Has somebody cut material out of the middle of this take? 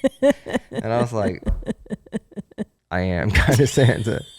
yes; 1 cut; at 2.8 s

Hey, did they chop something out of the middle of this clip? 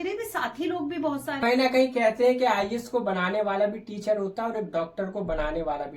yes; 1 cut; at 1.4 s

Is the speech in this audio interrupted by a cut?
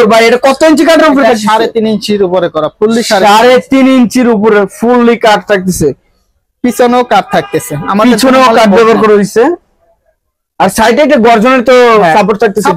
no; 0 cuts

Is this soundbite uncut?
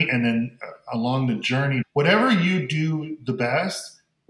yes; 0 cuts

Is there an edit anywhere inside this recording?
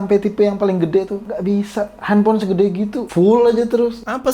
yes; 1 cut; at 1.2 s

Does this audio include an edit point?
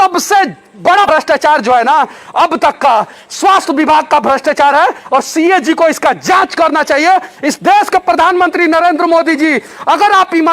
yes; 1 cut; at 1.1 s

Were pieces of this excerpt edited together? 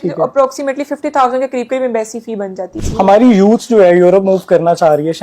yes; 1 cut; at 2.7 s

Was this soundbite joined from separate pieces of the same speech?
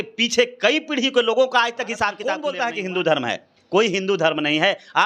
yes; 1 cut; at 2.3 s

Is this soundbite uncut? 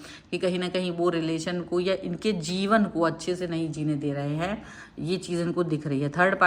yes; 0 cuts

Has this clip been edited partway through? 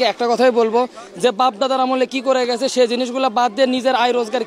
no; 0 cuts

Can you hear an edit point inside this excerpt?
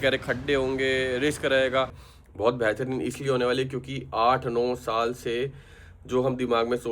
yes; 1 cut; at 2.1 s

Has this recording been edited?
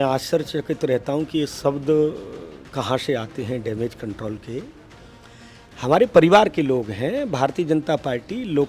no; 0 cuts

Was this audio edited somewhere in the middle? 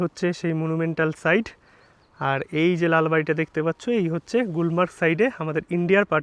no; 0 cuts

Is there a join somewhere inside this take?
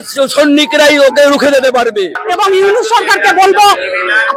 yes; 1 cut; at 2.2 s

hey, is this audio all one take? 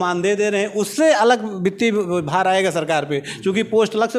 yes; 0 cuts

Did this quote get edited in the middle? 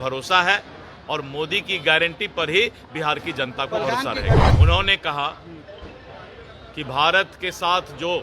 yes; 1 cut; at 4.5 s

